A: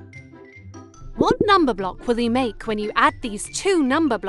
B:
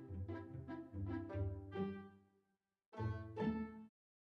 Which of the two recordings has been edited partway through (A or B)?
A